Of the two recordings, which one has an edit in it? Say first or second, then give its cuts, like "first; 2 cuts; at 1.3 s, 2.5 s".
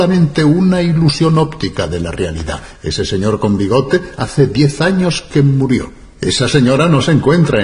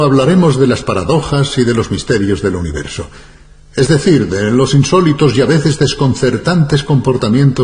second; 1 cut; at 4.3 s